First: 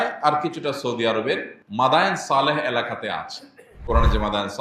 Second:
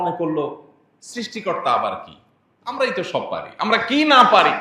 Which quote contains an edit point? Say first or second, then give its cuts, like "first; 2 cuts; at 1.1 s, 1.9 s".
first; 1 cut; at 1.6 s